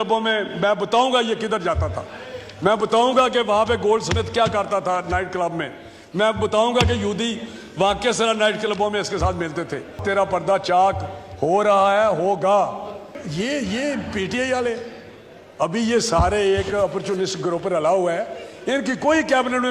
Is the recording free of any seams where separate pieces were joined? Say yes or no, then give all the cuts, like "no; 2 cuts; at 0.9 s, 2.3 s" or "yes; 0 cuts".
no; 2 cuts; at 10.0 s, 13.2 s